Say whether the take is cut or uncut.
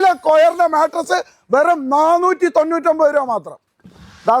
uncut